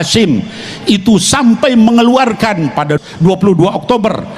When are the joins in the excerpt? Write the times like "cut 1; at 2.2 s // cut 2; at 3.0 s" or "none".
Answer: cut 1; at 2.9 s